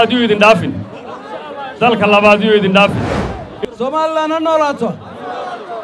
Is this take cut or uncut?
cut